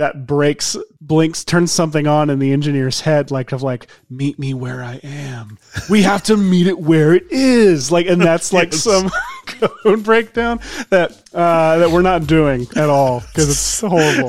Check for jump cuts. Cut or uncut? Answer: cut